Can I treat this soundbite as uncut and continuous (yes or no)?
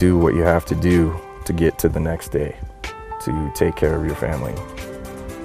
yes